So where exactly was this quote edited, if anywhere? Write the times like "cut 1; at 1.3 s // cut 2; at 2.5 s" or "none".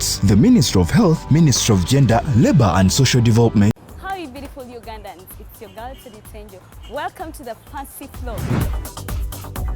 cut 1; at 3.9 s